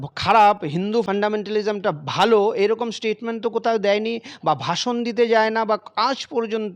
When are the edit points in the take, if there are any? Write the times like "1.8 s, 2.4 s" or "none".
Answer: none